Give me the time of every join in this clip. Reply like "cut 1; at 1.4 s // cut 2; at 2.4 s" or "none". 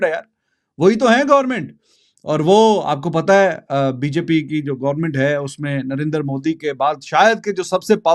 none